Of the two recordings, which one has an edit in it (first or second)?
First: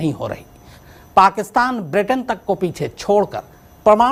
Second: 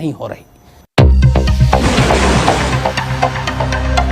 second